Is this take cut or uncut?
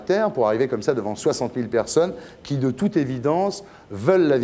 uncut